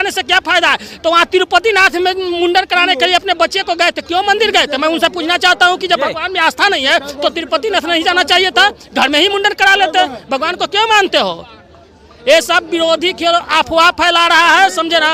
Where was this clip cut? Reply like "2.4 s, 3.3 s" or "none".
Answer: none